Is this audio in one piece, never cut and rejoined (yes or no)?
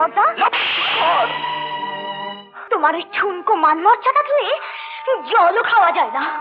no